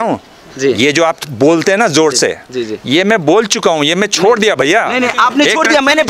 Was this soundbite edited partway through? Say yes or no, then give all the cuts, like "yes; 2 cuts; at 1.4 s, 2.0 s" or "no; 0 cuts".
no; 0 cuts